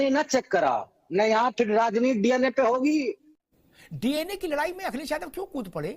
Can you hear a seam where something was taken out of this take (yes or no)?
yes